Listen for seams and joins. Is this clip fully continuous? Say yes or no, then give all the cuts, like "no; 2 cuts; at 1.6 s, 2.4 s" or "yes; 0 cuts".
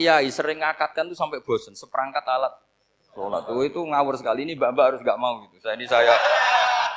yes; 0 cuts